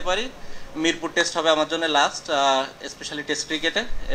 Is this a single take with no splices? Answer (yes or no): yes